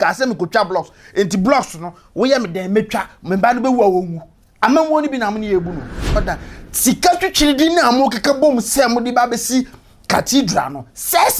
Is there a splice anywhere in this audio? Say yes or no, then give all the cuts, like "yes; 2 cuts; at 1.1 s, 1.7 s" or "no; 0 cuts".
yes; 1 cut; at 6.2 s